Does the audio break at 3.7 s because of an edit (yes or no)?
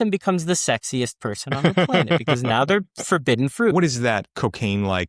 yes